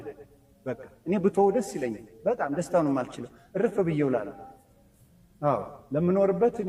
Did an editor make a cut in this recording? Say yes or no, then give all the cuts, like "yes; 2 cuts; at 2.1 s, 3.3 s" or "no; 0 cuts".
no; 0 cuts